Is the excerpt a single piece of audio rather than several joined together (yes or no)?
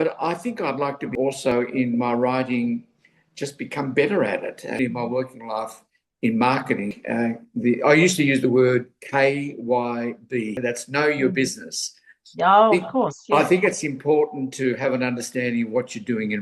no